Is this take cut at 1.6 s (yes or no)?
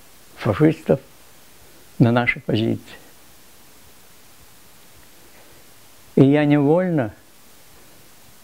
yes